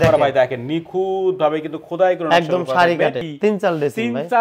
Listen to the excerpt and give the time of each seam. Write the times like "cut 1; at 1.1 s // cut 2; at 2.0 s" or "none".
cut 1; at 3.3 s